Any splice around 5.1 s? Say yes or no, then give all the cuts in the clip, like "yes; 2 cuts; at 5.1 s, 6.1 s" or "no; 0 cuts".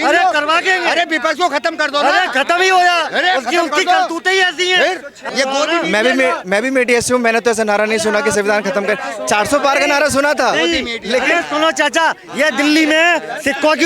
yes; 1 cut; at 5.1 s